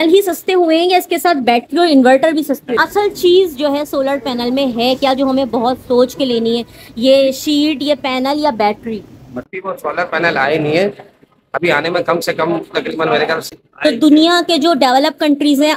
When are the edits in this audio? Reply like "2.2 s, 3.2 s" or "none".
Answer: 2.8 s, 9.3 s, 13.5 s

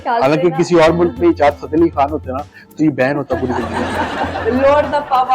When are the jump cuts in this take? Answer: 4.3 s

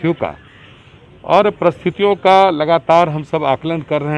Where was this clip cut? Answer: none

